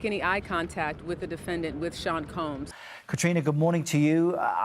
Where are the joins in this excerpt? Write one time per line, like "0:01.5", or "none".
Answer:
0:02.8